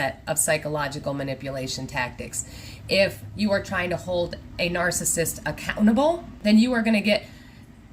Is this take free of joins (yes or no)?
no